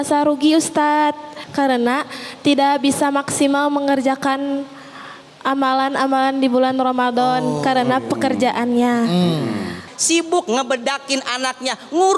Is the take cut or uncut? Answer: cut